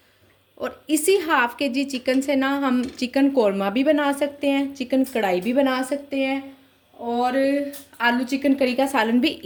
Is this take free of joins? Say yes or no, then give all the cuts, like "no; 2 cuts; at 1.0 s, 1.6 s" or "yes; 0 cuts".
yes; 0 cuts